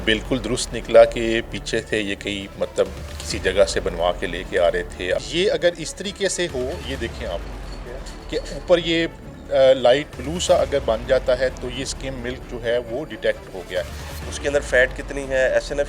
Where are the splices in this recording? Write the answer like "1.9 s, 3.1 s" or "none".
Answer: 5.2 s, 14.0 s